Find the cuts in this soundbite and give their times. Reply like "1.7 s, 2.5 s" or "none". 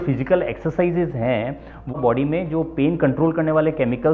1.9 s